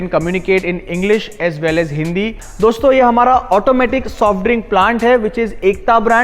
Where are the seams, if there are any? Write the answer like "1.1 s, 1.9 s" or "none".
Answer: 2.4 s